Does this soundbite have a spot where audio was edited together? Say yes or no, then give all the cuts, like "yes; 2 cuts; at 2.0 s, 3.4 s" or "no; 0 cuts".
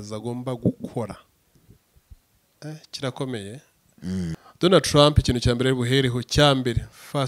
yes; 1 cut; at 4.4 s